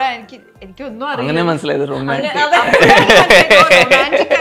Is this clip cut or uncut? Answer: uncut